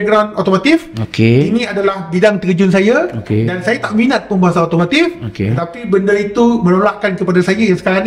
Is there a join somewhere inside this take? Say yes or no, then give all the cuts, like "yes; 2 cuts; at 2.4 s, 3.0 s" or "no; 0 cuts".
no; 0 cuts